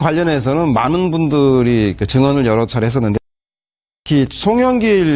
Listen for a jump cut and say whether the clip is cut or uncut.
cut